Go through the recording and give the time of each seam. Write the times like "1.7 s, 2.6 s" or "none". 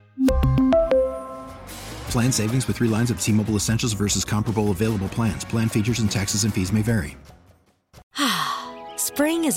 8.0 s